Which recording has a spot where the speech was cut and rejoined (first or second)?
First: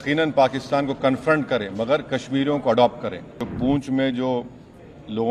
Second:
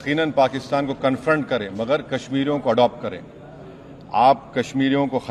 first